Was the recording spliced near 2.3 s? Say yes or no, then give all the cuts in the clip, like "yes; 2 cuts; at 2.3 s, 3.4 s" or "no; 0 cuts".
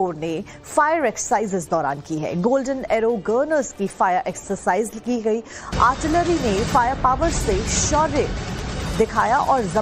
yes; 1 cut; at 2.3 s